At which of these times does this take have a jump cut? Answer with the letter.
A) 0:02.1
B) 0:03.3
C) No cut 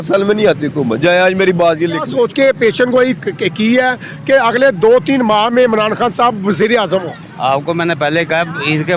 A